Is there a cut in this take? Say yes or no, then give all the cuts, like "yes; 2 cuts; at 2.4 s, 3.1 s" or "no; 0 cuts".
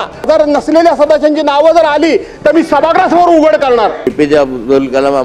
yes; 1 cut; at 4.1 s